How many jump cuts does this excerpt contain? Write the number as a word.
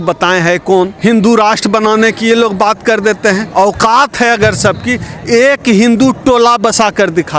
two